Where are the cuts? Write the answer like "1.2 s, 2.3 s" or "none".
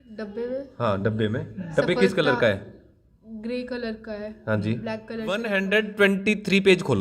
5.4 s